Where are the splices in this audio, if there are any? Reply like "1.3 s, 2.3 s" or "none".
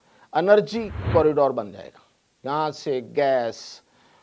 1.0 s